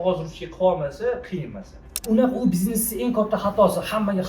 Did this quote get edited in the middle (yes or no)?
yes